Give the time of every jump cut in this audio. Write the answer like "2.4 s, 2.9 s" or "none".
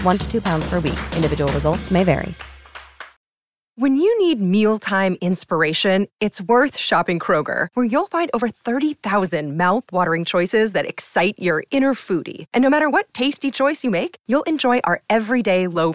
3.0 s